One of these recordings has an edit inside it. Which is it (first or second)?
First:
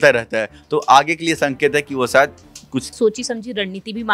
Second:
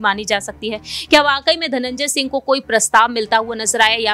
first